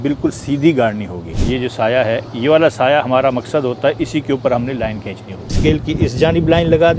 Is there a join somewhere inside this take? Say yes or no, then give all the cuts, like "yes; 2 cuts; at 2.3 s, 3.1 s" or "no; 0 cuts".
yes; 2 cuts; at 1.4 s, 5.5 s